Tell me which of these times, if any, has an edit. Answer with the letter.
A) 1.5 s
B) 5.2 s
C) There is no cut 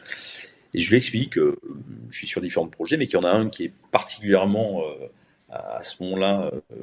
C